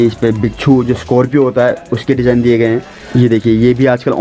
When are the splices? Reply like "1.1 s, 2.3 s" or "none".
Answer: 3.0 s

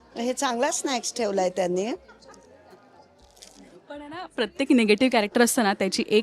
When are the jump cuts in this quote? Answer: none

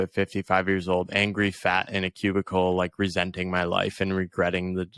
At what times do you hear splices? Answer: none

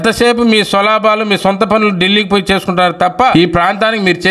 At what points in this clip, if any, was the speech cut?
3.3 s

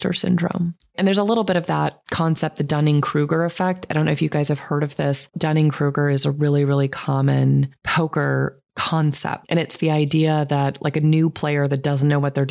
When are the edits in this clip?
0.9 s, 2.0 s, 5.3 s

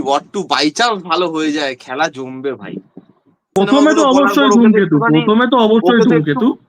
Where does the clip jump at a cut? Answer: 3.6 s

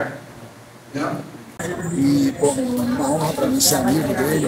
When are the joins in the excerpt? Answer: 1.7 s

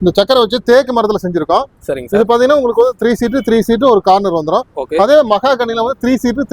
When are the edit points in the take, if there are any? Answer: none

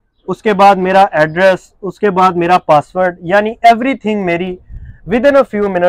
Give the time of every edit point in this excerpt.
none

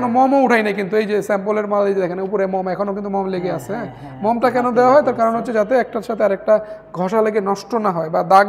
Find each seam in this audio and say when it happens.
none

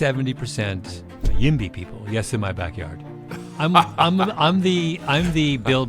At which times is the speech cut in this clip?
1.3 s

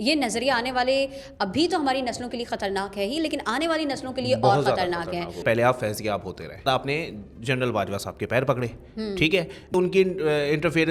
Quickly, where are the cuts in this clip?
5.4 s, 6.6 s, 9.8 s

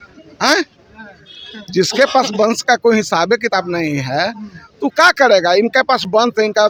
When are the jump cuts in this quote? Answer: none

